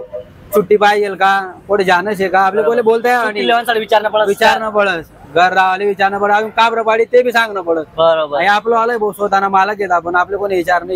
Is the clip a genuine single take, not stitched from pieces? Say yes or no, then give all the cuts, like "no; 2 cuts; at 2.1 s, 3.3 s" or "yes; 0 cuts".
yes; 0 cuts